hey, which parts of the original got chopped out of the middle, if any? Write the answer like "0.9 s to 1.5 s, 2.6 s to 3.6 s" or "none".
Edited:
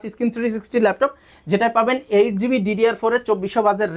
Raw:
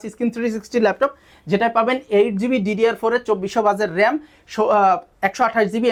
none